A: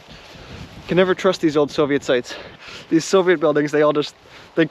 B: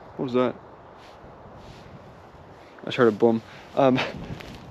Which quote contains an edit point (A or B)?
A